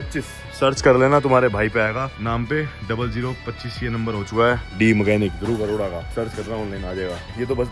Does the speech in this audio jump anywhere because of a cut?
no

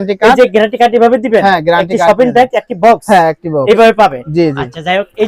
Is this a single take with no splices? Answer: yes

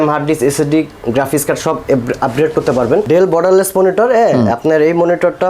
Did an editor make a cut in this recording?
yes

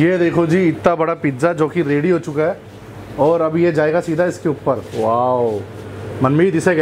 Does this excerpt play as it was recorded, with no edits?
yes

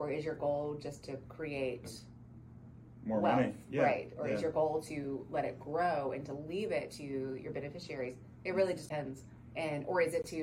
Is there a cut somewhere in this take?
yes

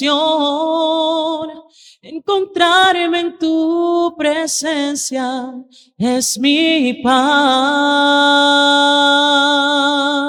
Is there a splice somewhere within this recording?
no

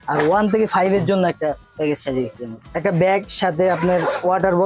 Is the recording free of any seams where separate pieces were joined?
no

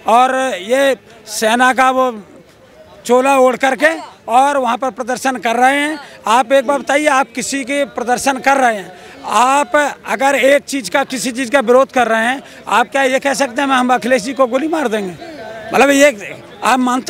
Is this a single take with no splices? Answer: yes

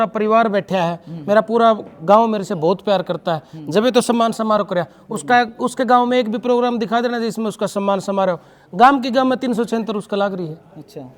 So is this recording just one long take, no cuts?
yes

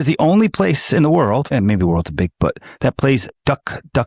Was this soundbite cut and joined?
no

